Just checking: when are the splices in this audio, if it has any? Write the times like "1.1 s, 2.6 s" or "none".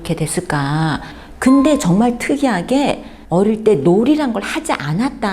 1.1 s, 3.1 s